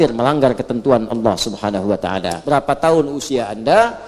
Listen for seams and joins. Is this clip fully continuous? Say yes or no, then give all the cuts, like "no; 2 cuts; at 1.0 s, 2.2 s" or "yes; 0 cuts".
no; 1 cut; at 2.4 s